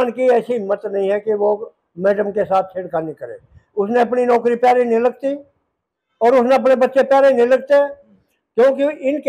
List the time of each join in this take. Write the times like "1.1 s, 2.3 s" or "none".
none